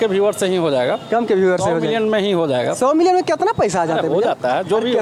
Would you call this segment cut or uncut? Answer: uncut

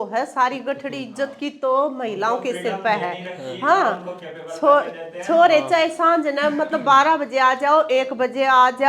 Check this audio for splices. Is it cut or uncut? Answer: uncut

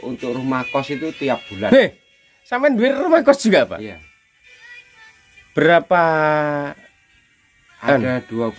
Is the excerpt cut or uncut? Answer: uncut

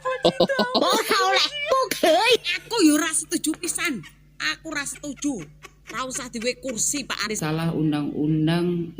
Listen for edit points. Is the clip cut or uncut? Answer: cut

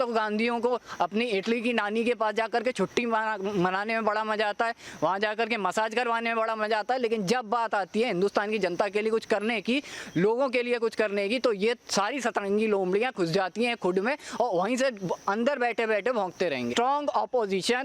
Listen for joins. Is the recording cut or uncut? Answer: cut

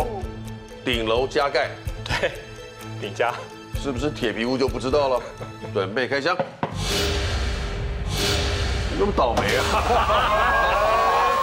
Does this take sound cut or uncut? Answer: uncut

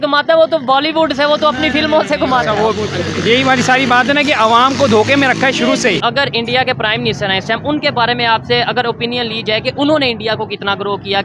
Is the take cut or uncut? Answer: cut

